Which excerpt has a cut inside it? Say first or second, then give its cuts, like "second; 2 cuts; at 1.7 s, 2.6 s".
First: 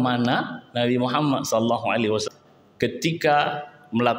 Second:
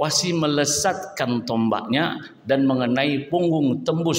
first; 1 cut; at 2.3 s